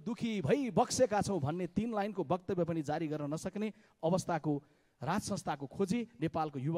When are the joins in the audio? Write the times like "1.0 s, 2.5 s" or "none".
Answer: none